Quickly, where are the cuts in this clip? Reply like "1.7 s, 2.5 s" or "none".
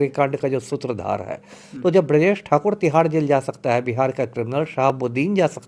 none